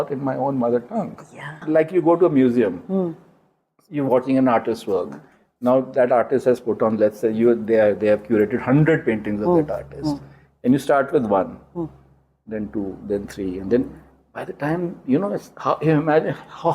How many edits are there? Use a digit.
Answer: 1